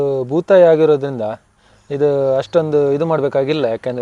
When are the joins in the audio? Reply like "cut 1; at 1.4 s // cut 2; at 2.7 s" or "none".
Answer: none